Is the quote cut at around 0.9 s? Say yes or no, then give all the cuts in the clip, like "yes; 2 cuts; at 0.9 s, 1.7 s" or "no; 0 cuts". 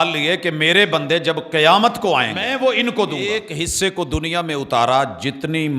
no; 2 cuts; at 2.4 s, 3.5 s